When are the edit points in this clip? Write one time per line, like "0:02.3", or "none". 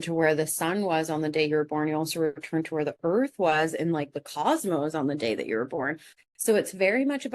0:06.1